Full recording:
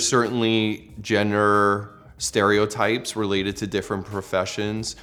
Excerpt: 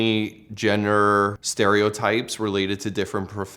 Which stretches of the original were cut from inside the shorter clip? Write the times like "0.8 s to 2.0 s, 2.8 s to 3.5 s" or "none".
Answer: 1.9 s to 2.2 s